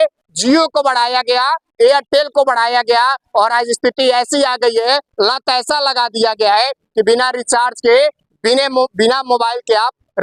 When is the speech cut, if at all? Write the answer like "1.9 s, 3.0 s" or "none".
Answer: none